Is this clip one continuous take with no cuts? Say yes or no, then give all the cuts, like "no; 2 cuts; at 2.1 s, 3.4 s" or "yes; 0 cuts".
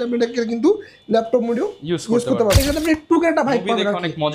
no; 1 cut; at 2.6 s